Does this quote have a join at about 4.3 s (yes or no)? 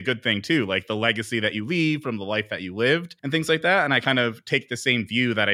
no